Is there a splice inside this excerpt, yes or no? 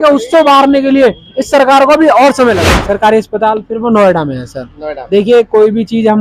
yes